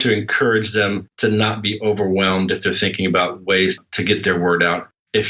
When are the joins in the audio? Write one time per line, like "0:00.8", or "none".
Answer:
0:01.1